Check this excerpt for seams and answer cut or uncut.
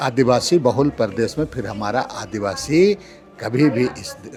uncut